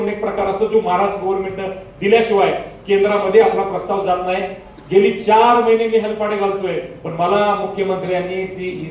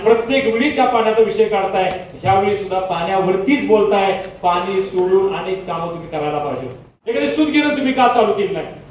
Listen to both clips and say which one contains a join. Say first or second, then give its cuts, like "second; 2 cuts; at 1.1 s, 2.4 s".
second; 1 cut; at 7.1 s